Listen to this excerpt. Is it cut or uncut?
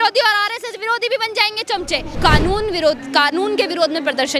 cut